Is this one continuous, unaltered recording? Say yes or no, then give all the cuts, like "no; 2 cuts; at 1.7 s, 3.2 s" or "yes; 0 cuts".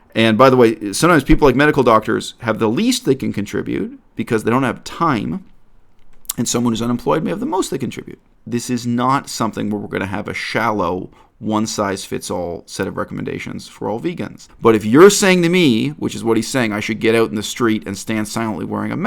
no; 2 cuts; at 8.3 s, 14.4 s